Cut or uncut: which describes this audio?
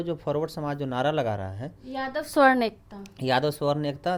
uncut